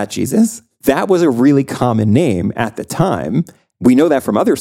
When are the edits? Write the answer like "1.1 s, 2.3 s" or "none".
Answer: 3.6 s